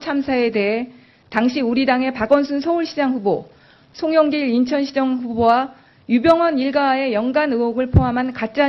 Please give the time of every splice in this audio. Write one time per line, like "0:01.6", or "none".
0:03.3